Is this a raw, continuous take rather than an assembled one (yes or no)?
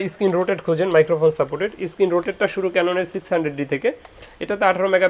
yes